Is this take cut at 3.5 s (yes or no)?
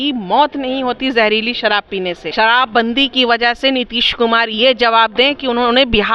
no